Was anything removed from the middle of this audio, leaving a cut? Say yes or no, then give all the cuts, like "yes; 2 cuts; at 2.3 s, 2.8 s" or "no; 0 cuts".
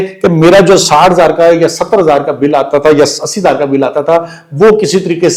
no; 0 cuts